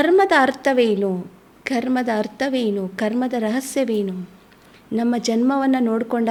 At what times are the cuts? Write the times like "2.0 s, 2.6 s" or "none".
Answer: none